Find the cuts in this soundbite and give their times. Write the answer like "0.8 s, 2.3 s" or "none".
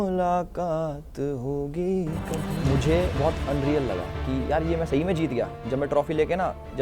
2.5 s